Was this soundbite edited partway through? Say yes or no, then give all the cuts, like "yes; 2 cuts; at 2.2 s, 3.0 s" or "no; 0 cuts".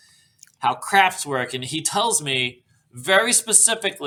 no; 0 cuts